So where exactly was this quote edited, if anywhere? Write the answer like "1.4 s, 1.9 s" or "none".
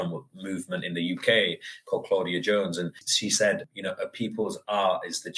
3.1 s